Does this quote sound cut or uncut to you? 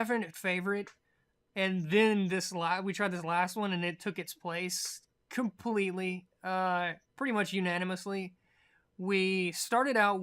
cut